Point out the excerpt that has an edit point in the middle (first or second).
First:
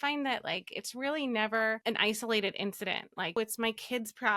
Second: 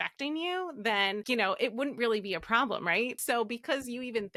first